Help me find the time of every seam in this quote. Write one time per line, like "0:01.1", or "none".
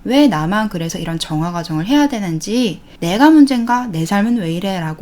0:02.9